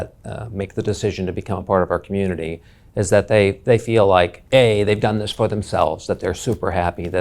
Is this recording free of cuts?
no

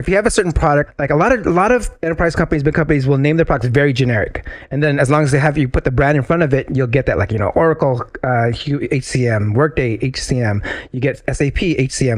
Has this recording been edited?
yes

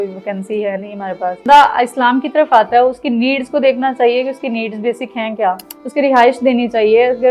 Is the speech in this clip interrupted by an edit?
yes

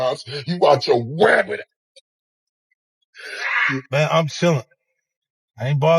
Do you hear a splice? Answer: yes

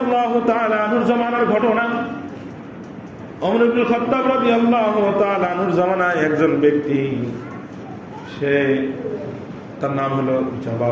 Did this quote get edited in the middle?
no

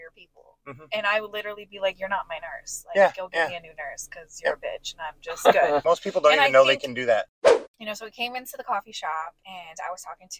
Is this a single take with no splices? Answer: no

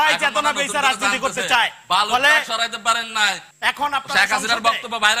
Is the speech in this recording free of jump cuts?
no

